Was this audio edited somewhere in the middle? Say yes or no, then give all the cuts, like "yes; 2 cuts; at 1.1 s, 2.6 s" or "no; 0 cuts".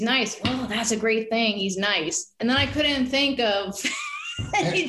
yes; 1 cut; at 2.3 s